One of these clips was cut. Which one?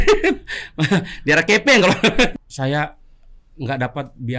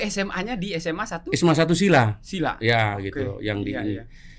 first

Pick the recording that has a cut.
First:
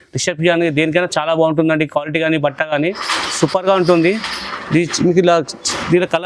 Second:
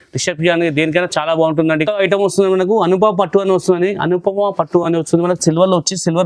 second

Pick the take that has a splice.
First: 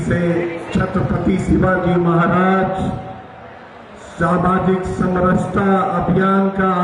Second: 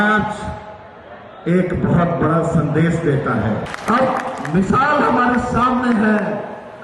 second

